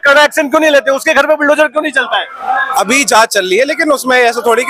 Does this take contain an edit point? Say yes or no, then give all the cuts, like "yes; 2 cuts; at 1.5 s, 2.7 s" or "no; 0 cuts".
no; 0 cuts